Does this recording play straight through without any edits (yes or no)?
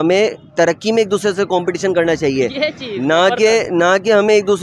yes